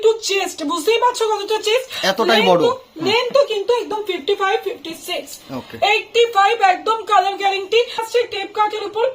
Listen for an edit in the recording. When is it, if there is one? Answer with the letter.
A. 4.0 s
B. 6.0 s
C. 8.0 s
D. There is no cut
C